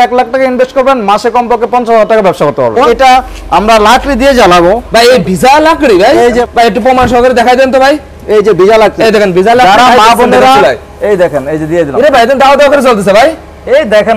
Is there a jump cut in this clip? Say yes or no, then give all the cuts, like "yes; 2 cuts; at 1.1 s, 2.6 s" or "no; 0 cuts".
yes; 2 cuts; at 2.9 s, 6.4 s